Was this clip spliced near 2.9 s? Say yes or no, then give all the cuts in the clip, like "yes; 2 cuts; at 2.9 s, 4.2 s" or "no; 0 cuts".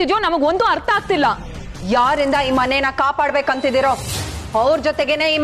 no; 0 cuts